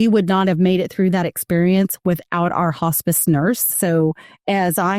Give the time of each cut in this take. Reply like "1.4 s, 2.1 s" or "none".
3.8 s